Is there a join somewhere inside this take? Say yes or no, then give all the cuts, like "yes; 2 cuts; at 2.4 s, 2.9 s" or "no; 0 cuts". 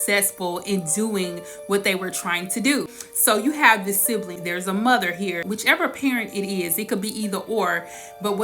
yes; 3 cuts; at 2.9 s, 4.4 s, 5.4 s